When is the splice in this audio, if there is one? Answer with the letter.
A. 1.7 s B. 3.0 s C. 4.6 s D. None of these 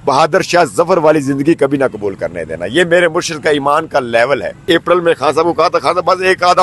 C